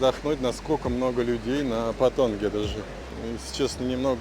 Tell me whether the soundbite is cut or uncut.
uncut